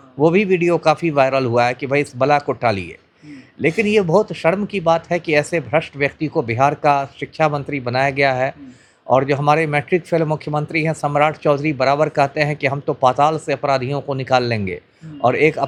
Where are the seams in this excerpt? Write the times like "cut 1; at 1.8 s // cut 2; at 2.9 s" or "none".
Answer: none